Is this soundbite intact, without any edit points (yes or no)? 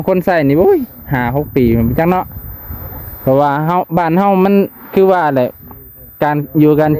yes